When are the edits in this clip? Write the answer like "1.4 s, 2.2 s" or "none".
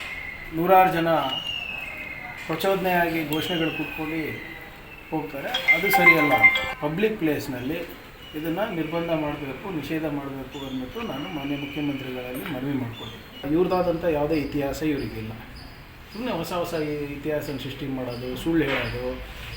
6.6 s, 13.4 s